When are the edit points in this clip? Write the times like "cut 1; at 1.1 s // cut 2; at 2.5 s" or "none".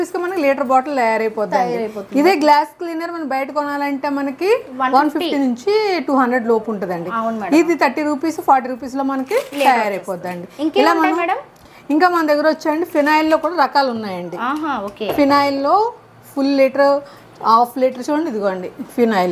none